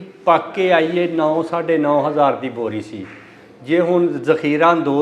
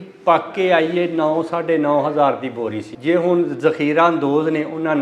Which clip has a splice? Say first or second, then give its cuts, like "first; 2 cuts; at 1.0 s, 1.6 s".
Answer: second; 1 cut; at 2.9 s